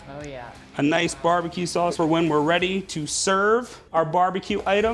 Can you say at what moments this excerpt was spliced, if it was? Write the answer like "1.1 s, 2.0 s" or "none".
1.9 s, 3.8 s